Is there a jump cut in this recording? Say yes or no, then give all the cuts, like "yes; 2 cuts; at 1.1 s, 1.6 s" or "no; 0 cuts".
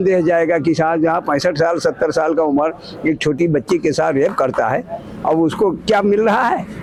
no; 0 cuts